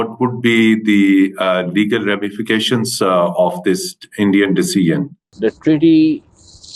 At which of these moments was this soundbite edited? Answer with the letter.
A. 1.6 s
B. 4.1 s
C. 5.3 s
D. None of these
C